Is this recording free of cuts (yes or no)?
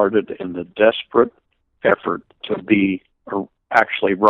no